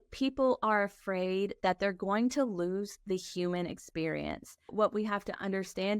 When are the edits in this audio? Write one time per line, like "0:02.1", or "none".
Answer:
0:04.7

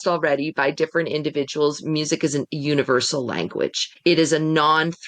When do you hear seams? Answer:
0:03.8

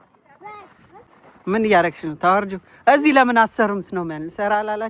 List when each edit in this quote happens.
0:01.1

